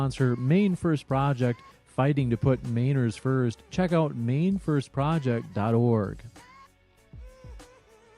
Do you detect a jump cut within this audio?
yes; 1 cut; at 7.0 s

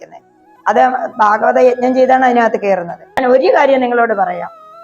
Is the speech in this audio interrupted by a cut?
yes; 1 cut; at 3.1 s

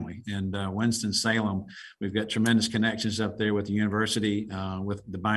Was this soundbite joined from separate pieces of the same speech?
no; 0 cuts

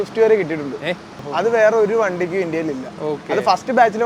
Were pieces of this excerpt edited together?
yes; 1 cut; at 1.2 s

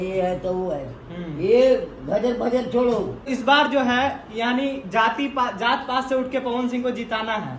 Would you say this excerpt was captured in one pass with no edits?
no; 1 cut; at 3.3 s

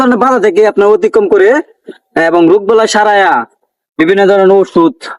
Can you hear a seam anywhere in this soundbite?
no; 0 cuts

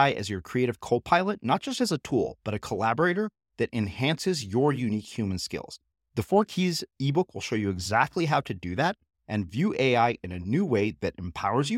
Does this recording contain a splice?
no; 0 cuts

